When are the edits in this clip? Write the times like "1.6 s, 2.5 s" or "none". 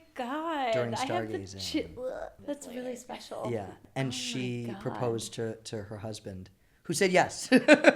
2.3 s, 3.8 s